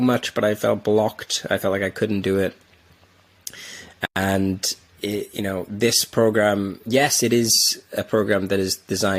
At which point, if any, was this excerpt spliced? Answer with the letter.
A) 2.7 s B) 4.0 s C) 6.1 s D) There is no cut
D